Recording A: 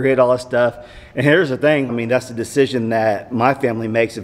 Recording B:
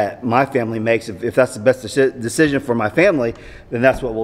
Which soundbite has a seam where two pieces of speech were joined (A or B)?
A